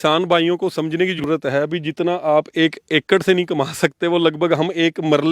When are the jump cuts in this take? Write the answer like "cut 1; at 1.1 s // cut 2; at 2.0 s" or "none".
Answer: cut 1; at 1.2 s